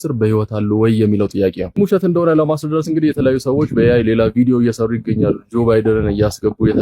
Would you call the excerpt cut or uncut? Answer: cut